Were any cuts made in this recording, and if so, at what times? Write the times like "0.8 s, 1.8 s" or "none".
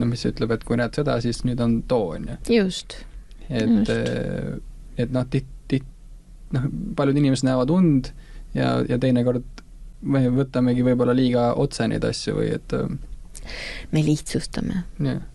none